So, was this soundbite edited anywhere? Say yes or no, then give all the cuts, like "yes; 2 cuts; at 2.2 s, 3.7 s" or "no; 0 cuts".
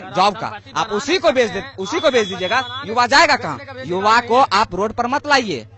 no; 0 cuts